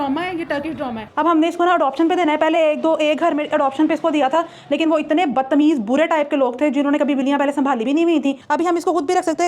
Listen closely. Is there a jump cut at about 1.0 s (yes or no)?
yes